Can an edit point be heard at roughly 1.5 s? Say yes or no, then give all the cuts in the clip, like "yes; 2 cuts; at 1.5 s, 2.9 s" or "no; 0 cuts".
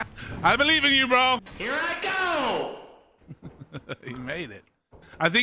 yes; 1 cut; at 1.5 s